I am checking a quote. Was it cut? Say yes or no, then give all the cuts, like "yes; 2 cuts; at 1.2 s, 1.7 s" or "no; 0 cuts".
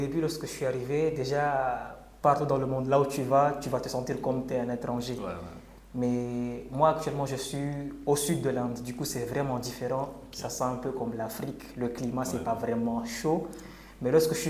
no; 0 cuts